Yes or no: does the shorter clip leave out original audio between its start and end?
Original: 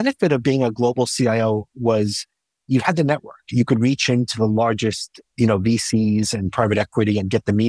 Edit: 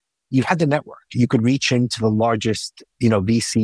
no